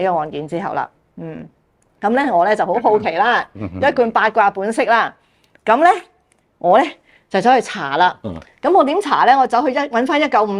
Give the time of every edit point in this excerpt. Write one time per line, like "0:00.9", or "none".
none